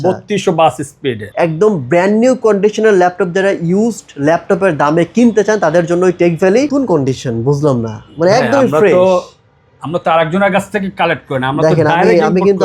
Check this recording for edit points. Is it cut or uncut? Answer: cut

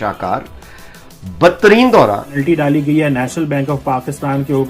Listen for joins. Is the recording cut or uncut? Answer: cut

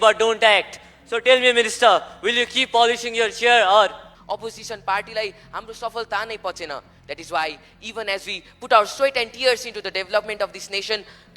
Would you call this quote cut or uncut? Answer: cut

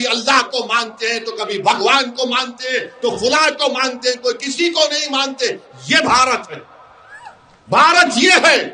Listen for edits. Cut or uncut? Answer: uncut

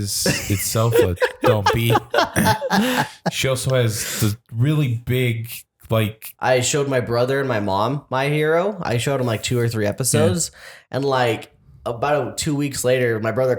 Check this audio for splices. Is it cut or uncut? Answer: cut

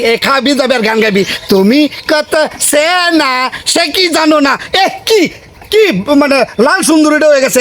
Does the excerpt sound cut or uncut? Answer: uncut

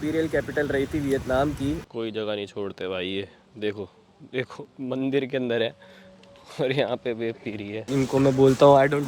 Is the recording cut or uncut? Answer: cut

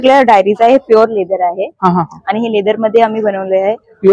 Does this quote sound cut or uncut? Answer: uncut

